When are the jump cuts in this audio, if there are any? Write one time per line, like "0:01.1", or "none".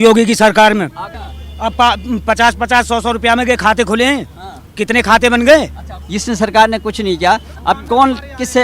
none